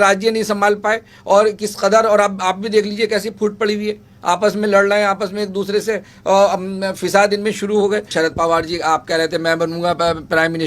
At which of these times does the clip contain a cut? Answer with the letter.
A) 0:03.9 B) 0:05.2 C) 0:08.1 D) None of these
C